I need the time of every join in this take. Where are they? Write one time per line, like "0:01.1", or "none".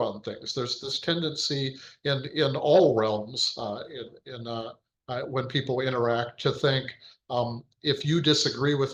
none